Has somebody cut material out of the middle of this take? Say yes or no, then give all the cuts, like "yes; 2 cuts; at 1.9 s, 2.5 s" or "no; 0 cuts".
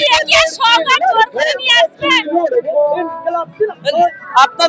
no; 0 cuts